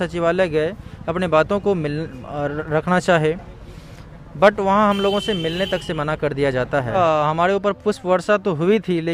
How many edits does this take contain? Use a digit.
1